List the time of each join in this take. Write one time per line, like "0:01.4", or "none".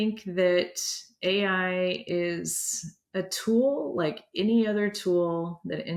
none